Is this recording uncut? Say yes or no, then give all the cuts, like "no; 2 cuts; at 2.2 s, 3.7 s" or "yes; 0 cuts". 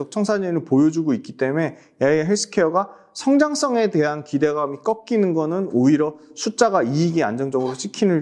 yes; 0 cuts